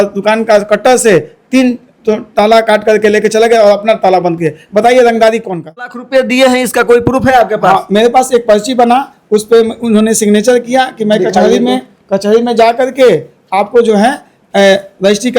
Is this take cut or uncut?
cut